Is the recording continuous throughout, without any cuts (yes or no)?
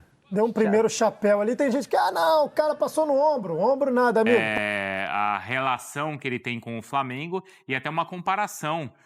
no